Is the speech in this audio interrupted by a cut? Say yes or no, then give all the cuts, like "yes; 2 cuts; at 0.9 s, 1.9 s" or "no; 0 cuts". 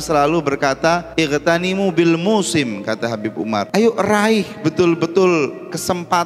yes; 2 cuts; at 1.1 s, 3.7 s